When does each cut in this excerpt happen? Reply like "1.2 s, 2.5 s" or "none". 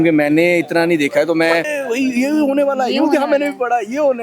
1.7 s